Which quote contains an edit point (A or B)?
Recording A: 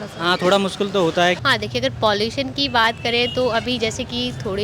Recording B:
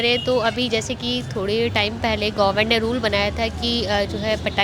A